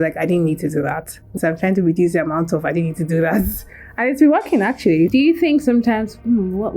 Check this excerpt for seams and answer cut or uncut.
cut